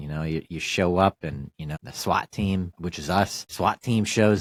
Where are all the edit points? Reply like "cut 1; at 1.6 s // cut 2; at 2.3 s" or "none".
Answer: none